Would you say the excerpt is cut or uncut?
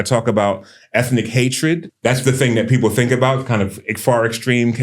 cut